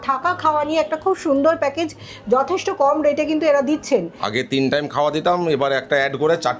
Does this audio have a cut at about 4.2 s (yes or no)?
yes